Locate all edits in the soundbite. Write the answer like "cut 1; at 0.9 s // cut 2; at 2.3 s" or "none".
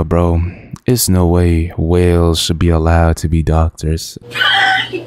cut 1; at 4.1 s